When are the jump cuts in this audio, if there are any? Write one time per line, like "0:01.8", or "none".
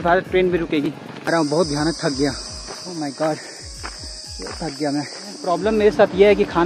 0:01.3
0:05.5